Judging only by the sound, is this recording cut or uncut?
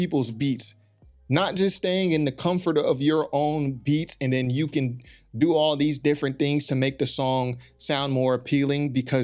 uncut